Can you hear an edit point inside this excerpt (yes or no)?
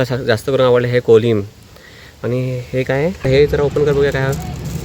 yes